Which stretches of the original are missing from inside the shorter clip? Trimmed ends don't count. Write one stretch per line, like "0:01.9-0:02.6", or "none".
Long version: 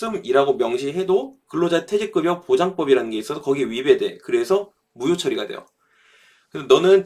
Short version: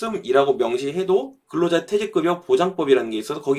none